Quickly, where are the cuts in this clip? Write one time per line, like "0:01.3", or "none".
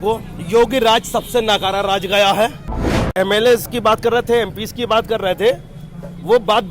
0:03.0